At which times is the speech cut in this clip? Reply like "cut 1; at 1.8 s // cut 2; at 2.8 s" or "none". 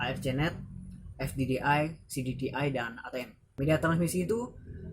cut 1; at 3.5 s